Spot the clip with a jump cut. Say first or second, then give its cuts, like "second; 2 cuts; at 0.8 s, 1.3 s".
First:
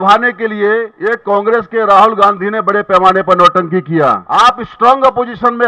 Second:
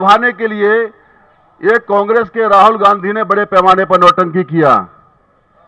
first; 2 cuts; at 0.9 s, 4.2 s